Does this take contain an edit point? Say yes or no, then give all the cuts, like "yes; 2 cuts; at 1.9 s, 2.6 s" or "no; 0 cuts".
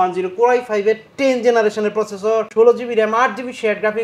yes; 1 cut; at 2.5 s